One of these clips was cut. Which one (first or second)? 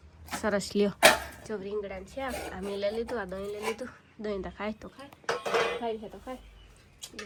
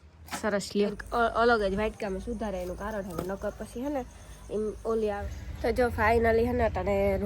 second